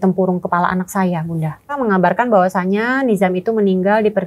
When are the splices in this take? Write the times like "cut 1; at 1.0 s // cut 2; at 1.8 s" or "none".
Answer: cut 1; at 1.8 s